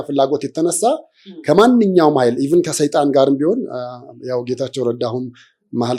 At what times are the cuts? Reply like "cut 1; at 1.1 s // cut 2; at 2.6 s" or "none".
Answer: none

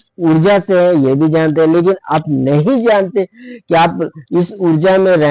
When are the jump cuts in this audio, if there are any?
none

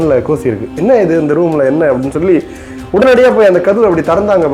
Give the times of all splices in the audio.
none

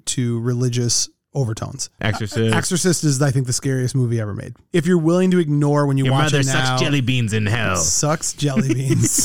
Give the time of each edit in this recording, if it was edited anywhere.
cut 1; at 2.0 s // cut 2; at 4.5 s

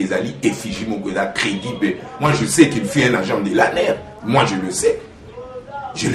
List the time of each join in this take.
cut 1; at 2.1 s

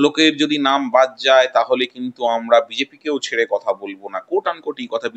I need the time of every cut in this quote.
none

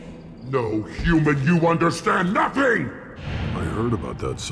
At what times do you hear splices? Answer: cut 1; at 3.0 s

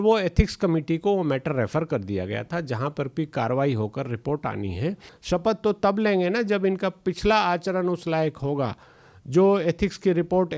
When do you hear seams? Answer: cut 1; at 5.1 s

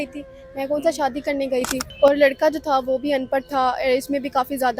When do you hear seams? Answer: cut 1; at 1.9 s

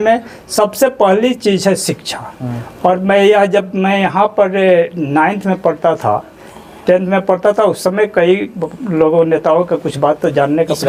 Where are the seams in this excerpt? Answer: none

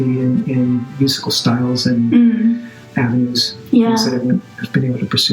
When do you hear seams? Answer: cut 1; at 2.8 s

